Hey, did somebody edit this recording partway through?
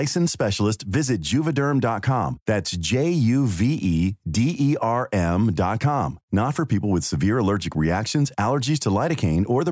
no; 0 cuts

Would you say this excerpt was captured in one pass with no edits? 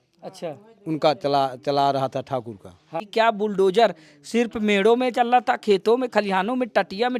no; 1 cut; at 3.0 s

